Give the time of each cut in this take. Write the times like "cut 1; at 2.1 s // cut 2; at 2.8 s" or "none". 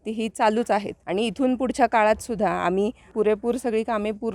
cut 1; at 1.0 s // cut 2; at 3.1 s